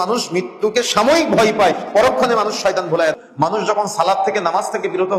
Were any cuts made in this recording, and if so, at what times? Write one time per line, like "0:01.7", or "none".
0:03.1